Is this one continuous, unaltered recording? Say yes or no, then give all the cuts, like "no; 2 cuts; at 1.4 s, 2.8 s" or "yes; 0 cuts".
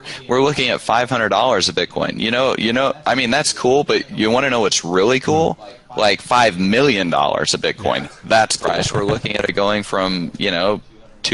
no; 1 cut; at 8.6 s